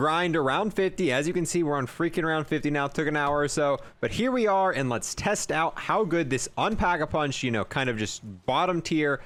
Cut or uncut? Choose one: uncut